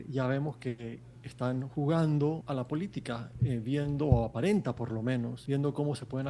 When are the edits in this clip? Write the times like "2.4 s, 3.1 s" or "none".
2.4 s, 5.4 s

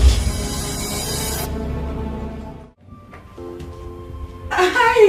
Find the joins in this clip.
2.5 s

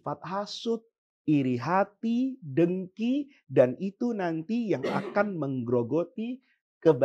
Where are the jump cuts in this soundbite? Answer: none

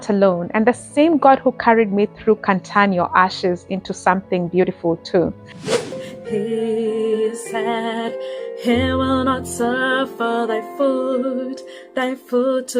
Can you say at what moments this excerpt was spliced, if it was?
5.8 s

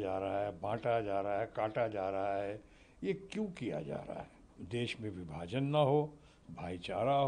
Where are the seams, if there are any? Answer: 4.6 s

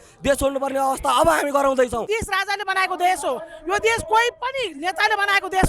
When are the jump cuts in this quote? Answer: 2.0 s

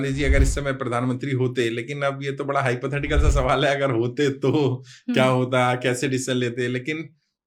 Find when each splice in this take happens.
none

